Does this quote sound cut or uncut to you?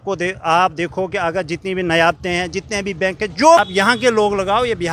cut